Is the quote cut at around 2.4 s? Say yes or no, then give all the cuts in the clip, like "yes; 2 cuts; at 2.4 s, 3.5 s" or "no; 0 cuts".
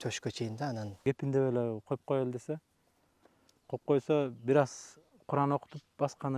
no; 1 cut; at 0.9 s